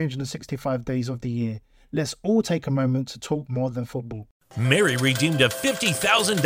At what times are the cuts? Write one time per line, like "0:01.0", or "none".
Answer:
0:04.2